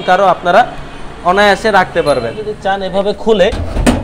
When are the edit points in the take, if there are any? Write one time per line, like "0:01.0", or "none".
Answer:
0:02.5